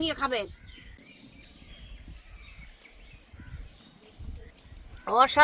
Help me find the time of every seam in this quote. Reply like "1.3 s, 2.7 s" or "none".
1.0 s, 4.5 s